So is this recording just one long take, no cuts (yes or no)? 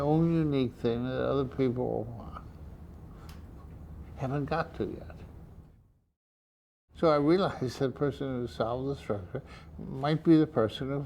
no